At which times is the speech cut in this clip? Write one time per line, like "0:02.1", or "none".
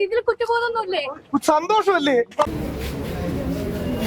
0:02.5